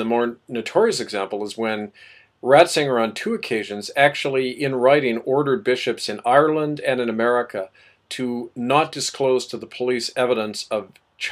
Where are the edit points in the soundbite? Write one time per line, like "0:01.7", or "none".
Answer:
none